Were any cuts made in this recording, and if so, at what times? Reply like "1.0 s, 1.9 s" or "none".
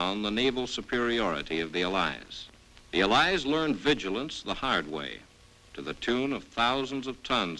5.9 s